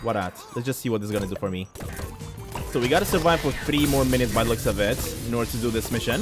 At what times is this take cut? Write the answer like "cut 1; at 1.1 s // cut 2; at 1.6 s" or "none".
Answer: cut 1; at 1.8 s